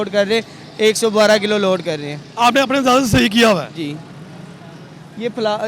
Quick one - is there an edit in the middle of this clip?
no; 0 cuts

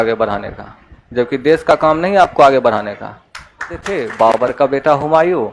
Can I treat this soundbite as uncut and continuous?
no; 1 cut; at 3.8 s

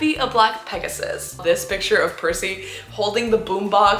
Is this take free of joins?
no; 1 cut; at 1.4 s

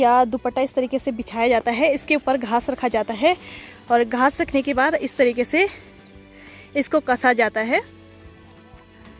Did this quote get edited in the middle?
no; 0 cuts

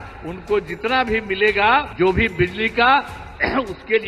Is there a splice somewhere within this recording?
yes; 1 cut; at 1.9 s

